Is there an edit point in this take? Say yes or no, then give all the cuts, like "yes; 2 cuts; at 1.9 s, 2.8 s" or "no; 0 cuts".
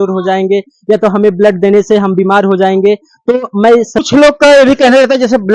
yes; 1 cut; at 4.0 s